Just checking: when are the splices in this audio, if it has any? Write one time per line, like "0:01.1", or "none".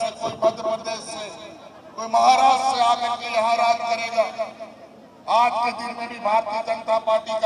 none